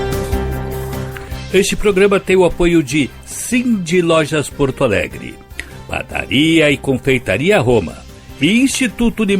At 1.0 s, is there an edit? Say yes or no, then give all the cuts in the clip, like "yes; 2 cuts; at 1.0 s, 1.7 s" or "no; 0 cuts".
yes; 1 cut; at 1.0 s